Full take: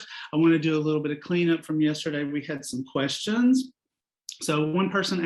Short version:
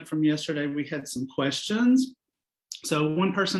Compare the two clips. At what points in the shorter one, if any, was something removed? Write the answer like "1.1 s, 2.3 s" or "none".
none